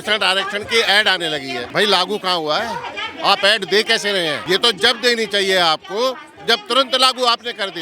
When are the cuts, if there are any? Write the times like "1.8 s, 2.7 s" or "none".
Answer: 1.6 s, 4.4 s